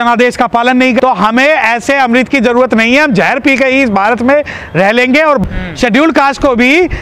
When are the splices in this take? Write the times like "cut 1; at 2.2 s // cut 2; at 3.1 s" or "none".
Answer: cut 1; at 1.0 s // cut 2; at 5.4 s